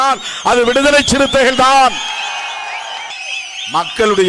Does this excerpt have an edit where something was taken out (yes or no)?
yes